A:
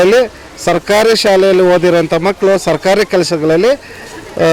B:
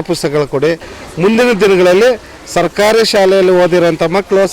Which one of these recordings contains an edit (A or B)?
B